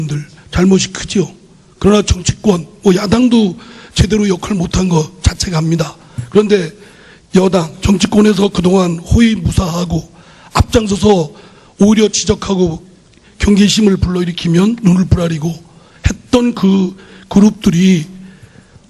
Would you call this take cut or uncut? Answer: cut